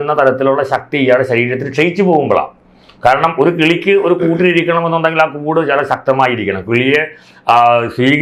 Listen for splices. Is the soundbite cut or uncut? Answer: uncut